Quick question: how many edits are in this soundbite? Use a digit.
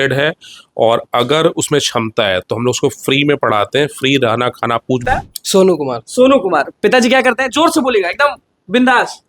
1